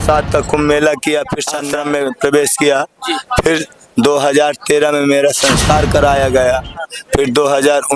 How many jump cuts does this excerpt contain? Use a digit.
1